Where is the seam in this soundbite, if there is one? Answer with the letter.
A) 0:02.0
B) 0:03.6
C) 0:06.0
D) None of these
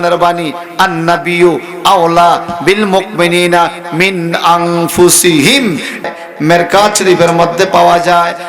C